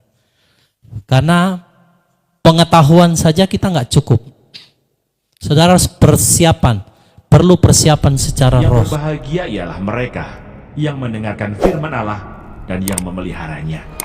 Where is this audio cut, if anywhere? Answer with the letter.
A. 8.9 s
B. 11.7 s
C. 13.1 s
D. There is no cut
A